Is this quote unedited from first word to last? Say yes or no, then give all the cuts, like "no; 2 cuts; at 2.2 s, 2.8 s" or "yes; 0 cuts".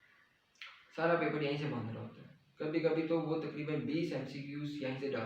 yes; 0 cuts